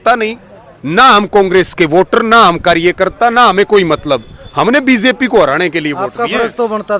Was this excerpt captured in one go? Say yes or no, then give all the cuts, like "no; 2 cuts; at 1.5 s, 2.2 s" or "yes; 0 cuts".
yes; 0 cuts